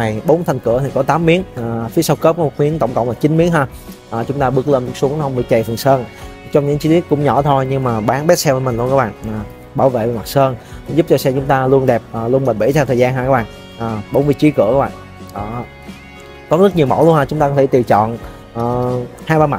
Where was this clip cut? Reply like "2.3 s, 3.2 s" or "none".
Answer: none